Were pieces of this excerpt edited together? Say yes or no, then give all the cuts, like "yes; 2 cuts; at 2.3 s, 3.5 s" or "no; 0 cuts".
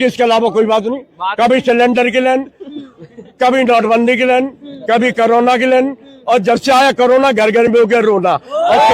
no; 0 cuts